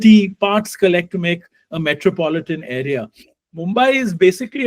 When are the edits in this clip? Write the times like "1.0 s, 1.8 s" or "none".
3.4 s